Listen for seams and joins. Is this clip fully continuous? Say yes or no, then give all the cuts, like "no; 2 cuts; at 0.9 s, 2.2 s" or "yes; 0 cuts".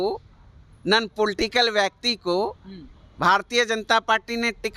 yes; 0 cuts